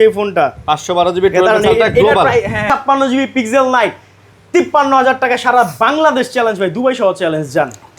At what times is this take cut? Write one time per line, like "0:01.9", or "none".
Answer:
0:02.7